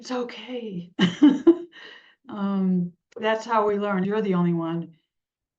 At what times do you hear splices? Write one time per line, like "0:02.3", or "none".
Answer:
0:04.1